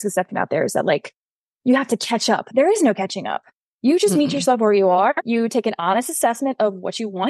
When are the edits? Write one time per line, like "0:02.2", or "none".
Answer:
none